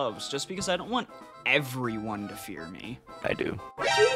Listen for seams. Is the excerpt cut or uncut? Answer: uncut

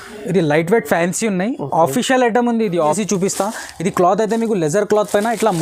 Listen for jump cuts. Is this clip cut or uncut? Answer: cut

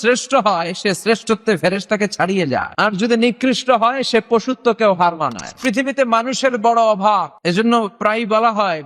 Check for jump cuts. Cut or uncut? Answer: cut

